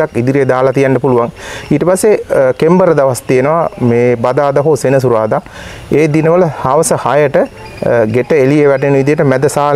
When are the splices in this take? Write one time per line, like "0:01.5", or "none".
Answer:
none